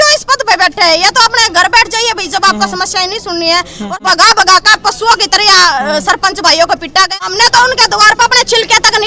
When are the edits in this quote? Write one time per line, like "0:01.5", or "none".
0:03.8
0:07.2